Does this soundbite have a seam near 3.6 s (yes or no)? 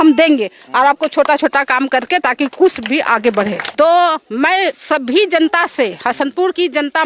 yes